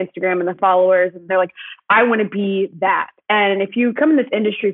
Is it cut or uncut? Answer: cut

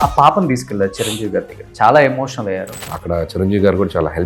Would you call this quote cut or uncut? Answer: cut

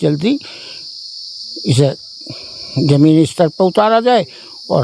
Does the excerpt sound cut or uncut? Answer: uncut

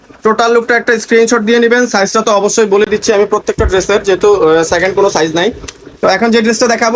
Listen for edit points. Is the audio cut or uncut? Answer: uncut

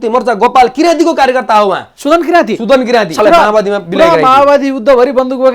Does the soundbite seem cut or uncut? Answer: cut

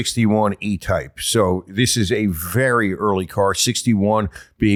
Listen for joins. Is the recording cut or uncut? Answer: uncut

